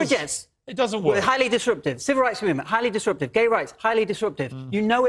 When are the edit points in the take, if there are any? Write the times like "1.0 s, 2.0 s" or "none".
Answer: none

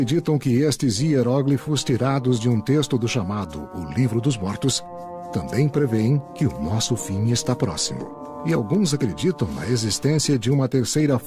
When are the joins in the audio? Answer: none

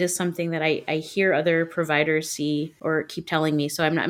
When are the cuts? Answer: 2.7 s

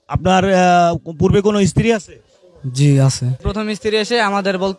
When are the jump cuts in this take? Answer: 3.4 s

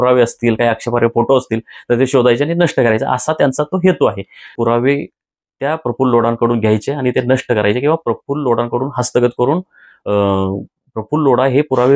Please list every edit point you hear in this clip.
4.5 s

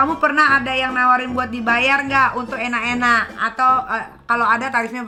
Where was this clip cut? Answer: none

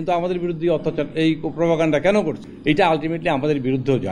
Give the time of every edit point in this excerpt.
2.4 s

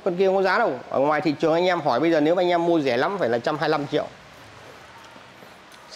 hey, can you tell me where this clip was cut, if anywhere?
none

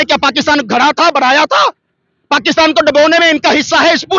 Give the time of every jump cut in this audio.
none

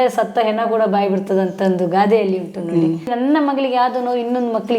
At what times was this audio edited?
3.1 s

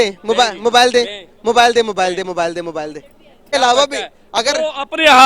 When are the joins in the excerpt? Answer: 3.5 s

